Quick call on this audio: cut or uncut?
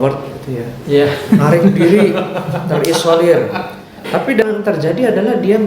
cut